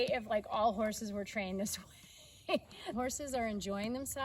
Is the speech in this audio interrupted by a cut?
yes; 1 cut; at 2.9 s

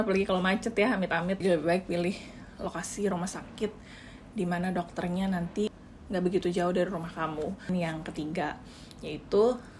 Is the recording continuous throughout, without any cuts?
yes; 0 cuts

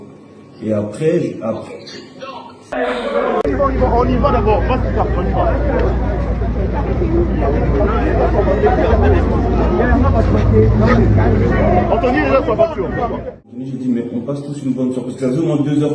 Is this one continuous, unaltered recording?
no; 2 cuts; at 2.7 s, 13.5 s

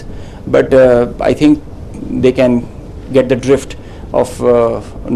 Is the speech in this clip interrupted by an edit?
no; 0 cuts

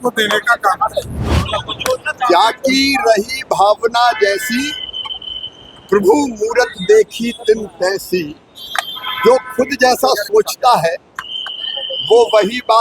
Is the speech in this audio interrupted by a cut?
yes; 1 cut; at 1.5 s

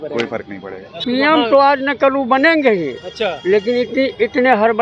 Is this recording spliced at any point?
yes; 1 cut; at 1.0 s

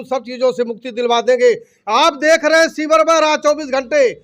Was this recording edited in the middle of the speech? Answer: no; 0 cuts

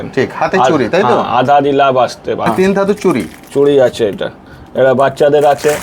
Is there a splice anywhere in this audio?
yes; 1 cut; at 2.5 s

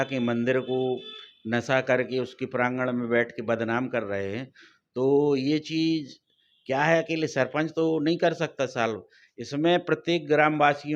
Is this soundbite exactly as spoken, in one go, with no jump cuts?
yes; 0 cuts

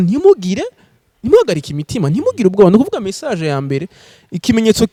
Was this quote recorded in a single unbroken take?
yes; 0 cuts

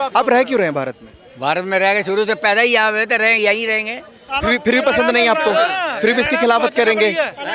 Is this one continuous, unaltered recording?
yes; 0 cuts

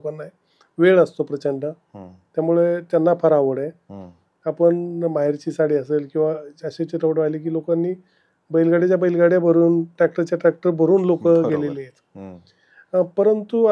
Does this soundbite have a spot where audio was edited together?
no; 0 cuts

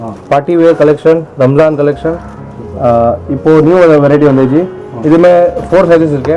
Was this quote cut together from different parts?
no; 0 cuts

